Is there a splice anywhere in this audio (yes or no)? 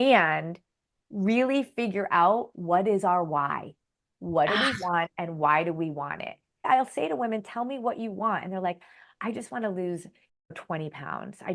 yes